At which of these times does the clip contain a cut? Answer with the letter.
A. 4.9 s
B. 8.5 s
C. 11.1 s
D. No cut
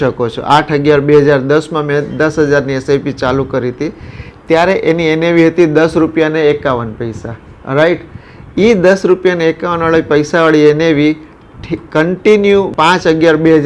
D